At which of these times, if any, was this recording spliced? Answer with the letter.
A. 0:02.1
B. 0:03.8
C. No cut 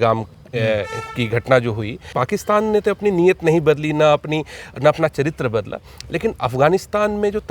A